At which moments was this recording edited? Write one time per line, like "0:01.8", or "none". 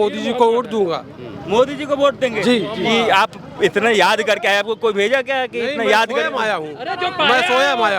none